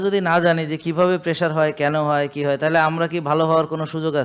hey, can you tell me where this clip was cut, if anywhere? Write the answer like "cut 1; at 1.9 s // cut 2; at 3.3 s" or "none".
none